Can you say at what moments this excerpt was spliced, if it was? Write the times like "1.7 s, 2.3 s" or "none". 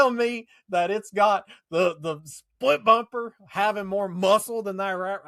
none